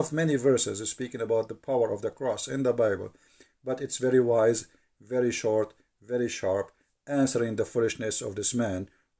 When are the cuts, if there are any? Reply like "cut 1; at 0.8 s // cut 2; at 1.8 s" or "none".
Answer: none